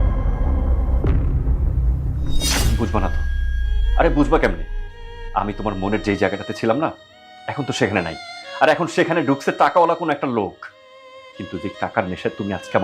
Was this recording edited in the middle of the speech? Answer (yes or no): no